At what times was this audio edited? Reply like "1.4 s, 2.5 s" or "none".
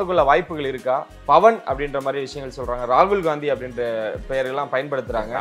none